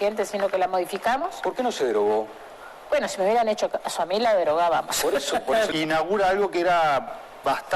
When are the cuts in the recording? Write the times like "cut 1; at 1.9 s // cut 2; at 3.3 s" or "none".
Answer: cut 1; at 5.7 s